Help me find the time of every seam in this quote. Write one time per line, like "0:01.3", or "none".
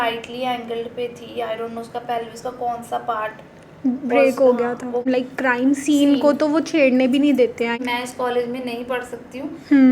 0:05.0
0:07.8